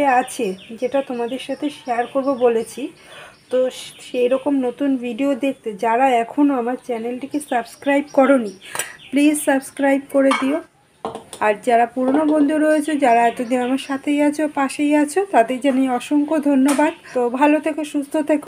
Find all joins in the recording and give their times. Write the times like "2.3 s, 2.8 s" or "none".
17.0 s